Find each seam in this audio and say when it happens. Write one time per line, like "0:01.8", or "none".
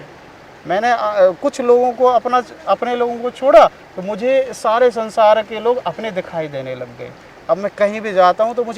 none